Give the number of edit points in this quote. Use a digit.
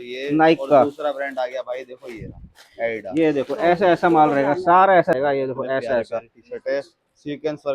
1